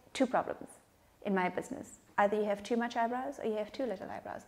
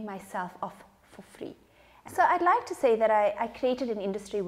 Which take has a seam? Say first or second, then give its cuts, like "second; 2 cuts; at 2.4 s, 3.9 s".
second; 1 cut; at 2.0 s